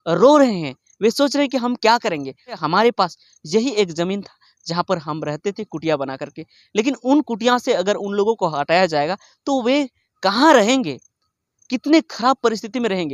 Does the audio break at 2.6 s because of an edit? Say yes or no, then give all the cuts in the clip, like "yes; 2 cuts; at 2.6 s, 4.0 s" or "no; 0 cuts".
yes; 1 cut; at 2.6 s